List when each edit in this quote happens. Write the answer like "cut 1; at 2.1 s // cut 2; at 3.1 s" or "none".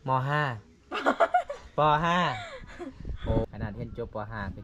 cut 1; at 3.5 s